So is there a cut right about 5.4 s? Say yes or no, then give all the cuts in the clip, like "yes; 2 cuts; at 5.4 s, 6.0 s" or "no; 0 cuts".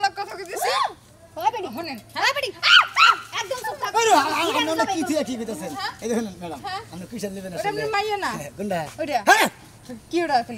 no; 0 cuts